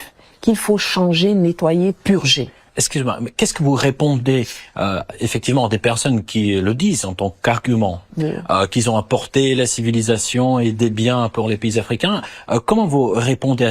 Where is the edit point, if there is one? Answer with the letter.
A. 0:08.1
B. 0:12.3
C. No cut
A